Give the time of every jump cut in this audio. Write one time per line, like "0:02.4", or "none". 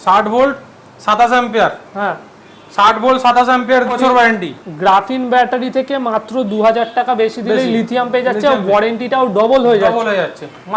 0:03.9